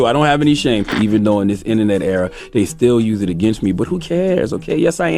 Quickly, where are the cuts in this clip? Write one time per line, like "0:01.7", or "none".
0:00.9